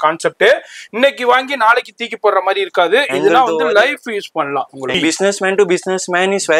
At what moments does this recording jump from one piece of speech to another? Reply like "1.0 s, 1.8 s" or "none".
4.9 s